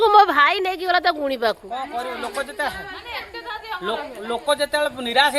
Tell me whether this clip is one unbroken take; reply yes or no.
yes